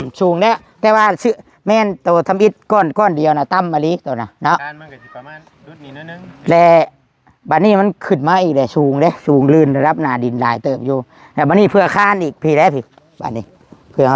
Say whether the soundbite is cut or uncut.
uncut